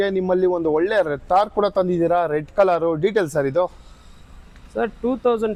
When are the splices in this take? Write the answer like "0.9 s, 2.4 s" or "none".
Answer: none